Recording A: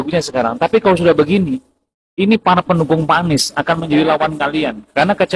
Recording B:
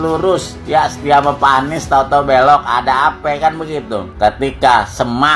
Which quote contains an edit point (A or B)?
B